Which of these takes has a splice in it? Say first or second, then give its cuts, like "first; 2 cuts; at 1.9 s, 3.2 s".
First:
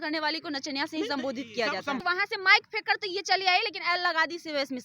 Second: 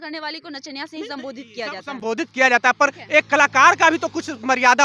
first; 1 cut; at 2.0 s